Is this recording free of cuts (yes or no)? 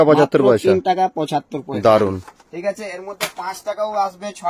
yes